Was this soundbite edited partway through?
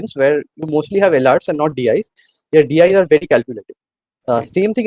no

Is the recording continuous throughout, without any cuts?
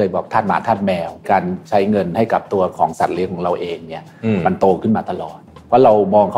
no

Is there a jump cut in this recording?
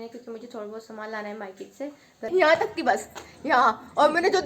yes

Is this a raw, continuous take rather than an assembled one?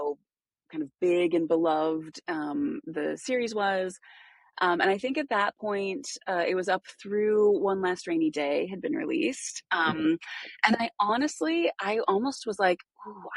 yes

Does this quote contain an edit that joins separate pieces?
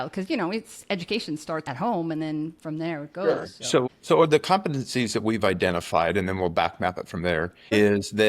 yes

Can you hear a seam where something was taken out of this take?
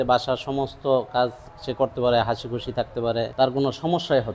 yes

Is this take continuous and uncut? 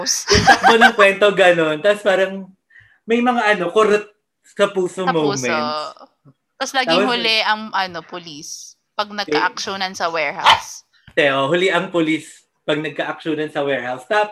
yes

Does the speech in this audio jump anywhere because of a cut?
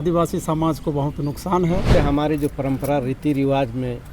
yes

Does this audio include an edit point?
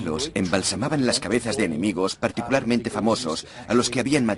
yes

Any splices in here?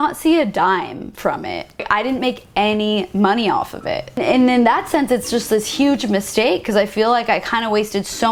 no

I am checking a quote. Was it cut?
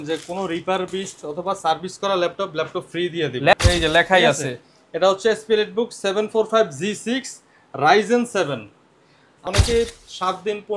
yes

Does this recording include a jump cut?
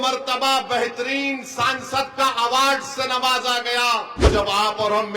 yes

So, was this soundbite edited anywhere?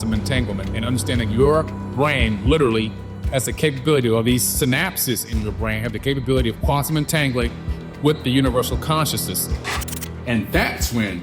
yes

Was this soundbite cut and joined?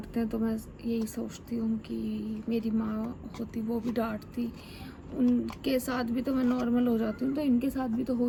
no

